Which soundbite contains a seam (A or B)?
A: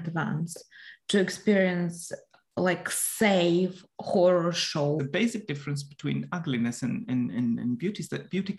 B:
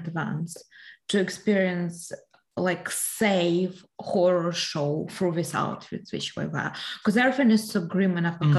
A